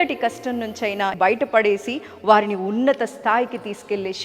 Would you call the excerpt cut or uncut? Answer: cut